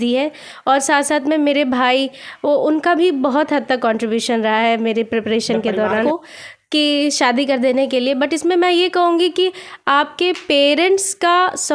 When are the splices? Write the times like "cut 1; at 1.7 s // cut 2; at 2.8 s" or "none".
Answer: cut 1; at 6.0 s